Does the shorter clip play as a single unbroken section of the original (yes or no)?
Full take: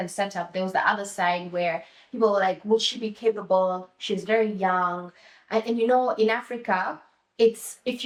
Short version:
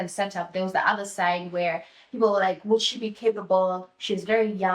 yes